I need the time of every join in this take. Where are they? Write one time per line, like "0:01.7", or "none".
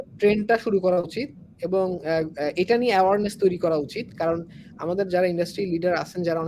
none